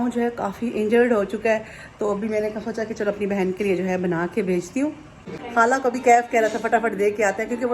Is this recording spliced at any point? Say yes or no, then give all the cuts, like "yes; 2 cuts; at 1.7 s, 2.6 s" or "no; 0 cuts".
yes; 1 cut; at 5.3 s